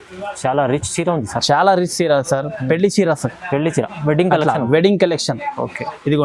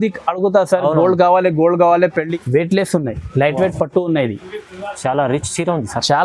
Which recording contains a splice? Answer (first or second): second